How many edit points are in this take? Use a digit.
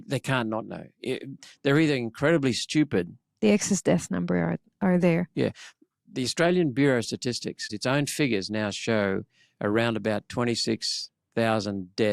1